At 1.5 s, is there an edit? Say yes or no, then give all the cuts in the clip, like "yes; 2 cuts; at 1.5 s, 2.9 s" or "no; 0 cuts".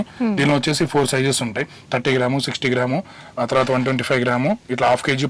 no; 0 cuts